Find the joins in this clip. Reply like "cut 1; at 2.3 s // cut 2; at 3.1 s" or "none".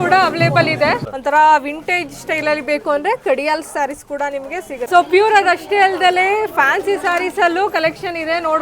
cut 1; at 1.1 s // cut 2; at 4.9 s